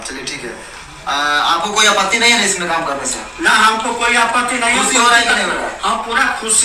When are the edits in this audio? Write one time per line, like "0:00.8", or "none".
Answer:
none